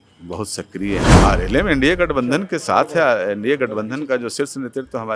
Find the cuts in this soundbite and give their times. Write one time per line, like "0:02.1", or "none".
0:01.2